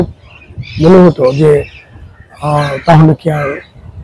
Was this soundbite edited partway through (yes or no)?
no